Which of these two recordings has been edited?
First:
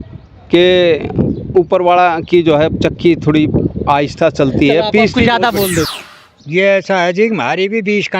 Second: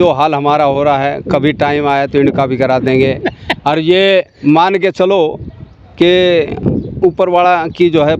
first; 1 cut; at 5.9 s

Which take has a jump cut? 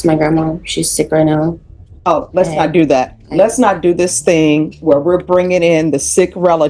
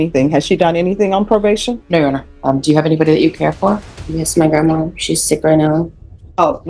second; 1 cut; at 2.3 s

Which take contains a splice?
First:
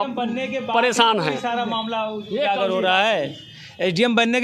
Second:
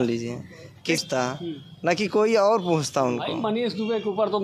second; 1 cut; at 1.0 s

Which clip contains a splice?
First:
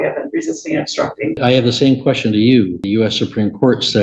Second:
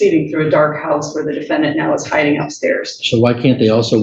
first; 2 cuts; at 1.4 s, 2.8 s

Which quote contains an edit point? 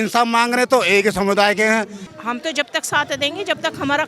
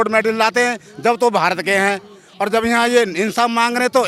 first; 1 cut; at 2.0 s

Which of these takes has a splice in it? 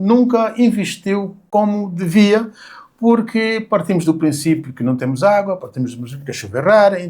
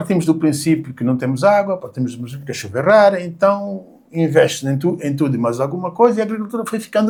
first; 1 cut; at 1.3 s

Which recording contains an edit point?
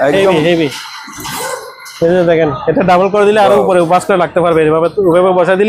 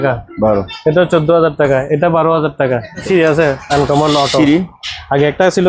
second; 1 cut; at 3.0 s

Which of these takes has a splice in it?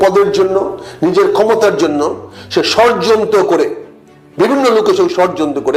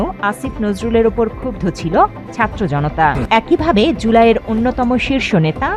second; 1 cut; at 3.2 s

